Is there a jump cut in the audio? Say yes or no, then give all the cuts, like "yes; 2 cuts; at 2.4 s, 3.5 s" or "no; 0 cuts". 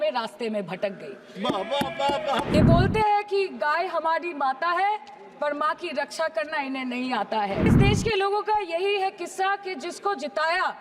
yes; 2 cuts; at 2.5 s, 7.7 s